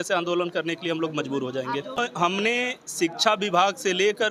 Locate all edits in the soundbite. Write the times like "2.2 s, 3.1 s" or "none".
none